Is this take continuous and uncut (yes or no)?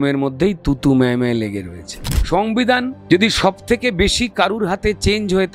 no